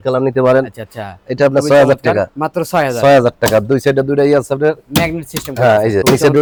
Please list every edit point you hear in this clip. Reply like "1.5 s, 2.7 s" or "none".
none